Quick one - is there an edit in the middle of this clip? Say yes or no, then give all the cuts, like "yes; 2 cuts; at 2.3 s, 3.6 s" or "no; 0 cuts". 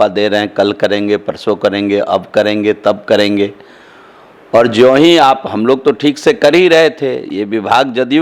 no; 0 cuts